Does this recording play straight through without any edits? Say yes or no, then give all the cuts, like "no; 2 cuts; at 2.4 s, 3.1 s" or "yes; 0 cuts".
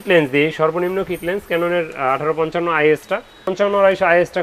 no; 1 cut; at 3.5 s